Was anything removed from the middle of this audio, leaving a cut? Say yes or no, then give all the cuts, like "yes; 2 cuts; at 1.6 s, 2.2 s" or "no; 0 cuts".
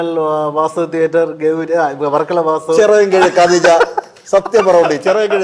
no; 0 cuts